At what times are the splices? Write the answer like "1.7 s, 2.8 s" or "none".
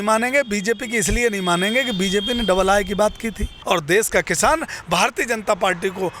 3.5 s